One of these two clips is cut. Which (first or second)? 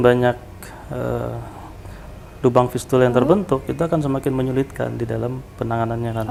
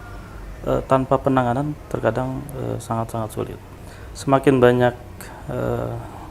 second